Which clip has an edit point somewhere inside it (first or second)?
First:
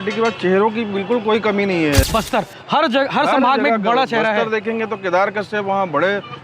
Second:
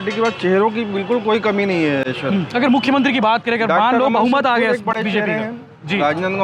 first